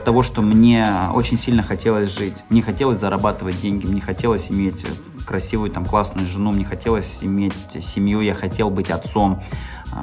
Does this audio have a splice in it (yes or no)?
no